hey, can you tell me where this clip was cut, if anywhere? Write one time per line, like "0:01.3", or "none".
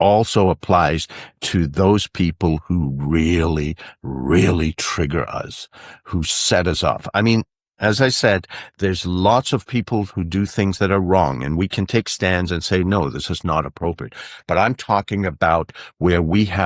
none